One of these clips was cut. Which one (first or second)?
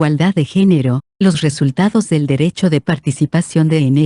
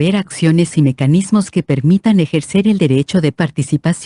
first